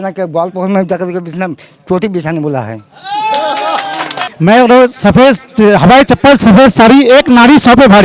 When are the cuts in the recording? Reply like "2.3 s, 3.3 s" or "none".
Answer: 4.1 s